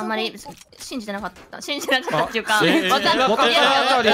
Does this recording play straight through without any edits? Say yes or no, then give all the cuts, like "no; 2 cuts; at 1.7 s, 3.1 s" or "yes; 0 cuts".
yes; 0 cuts